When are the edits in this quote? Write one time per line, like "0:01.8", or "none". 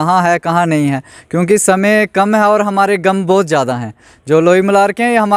none